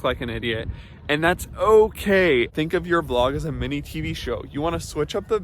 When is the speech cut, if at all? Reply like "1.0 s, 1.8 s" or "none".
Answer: 2.5 s